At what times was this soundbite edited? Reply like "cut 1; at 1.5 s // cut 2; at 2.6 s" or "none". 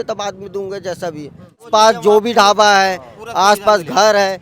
cut 1; at 1.7 s